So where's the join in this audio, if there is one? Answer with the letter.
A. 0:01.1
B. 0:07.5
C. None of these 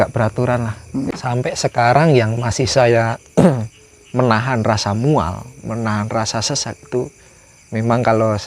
A